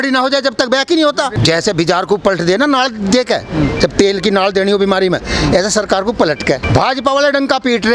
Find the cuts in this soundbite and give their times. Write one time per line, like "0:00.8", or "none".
0:01.4
0:06.6